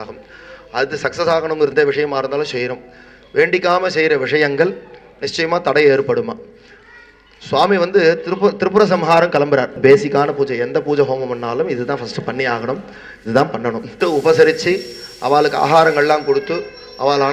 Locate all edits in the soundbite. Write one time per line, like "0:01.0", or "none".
0:01.7
0:09.7
0:13.9